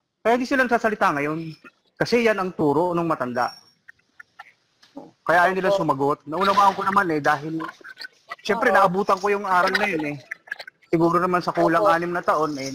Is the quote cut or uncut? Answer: uncut